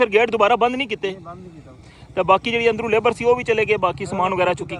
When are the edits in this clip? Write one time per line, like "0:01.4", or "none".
none